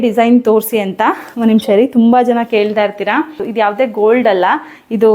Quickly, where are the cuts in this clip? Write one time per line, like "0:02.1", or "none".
0:03.4

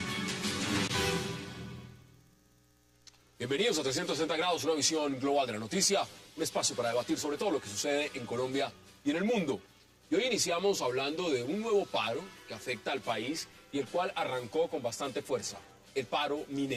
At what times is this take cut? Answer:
none

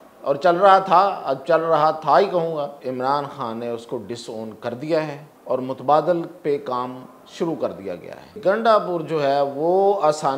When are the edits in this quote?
0:02.8
0:05.3
0:08.3

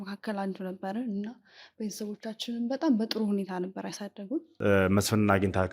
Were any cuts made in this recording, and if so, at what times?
0:04.5

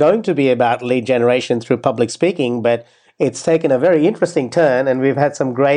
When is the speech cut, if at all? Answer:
none

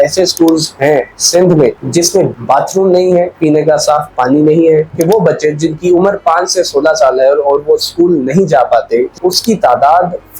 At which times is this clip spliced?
0:02.3
0:04.9
0:09.1

